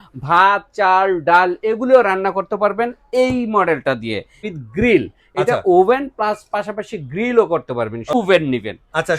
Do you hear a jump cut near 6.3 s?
no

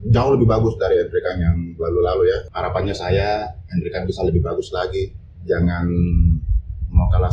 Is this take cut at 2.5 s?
yes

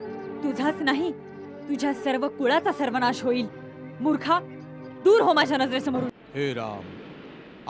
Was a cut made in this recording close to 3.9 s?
no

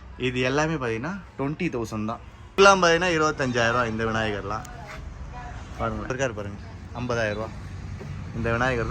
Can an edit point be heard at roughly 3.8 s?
no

